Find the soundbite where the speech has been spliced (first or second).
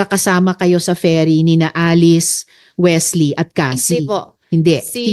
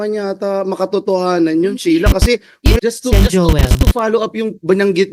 second